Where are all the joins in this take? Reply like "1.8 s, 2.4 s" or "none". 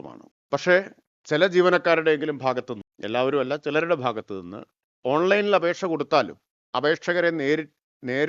none